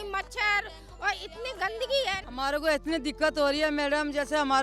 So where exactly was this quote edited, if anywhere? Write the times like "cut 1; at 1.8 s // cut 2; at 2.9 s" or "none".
cut 1; at 2.2 s